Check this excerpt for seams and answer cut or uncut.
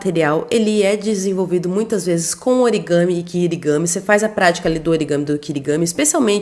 uncut